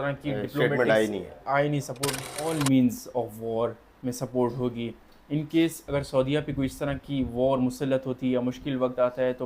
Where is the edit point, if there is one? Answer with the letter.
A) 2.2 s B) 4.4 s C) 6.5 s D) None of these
A